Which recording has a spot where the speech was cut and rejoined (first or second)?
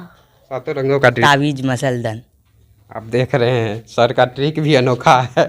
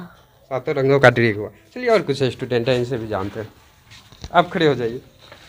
first